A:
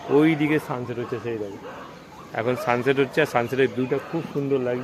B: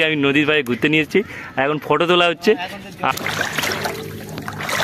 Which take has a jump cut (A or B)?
B